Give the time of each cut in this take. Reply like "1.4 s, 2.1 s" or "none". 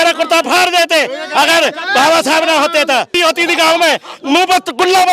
3.1 s